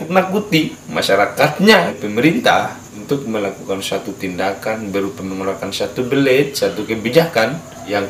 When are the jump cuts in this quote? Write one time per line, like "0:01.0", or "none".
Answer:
0:01.8